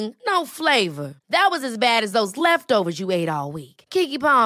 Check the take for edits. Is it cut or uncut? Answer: uncut